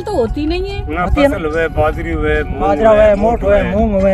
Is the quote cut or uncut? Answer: uncut